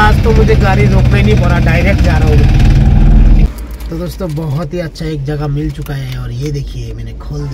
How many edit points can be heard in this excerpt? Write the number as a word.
one